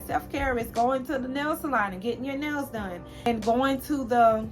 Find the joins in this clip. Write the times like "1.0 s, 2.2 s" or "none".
3.3 s